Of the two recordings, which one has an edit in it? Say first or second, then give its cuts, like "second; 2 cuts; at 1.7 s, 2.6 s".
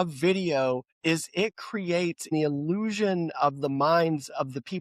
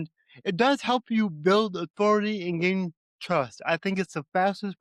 first; 2 cuts; at 0.9 s, 2.3 s